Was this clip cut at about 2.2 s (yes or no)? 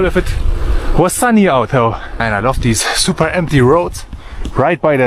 yes